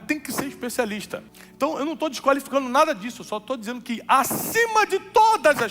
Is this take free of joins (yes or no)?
no